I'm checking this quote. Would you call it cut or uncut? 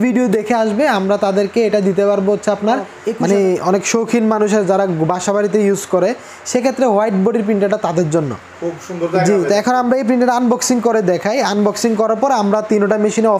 cut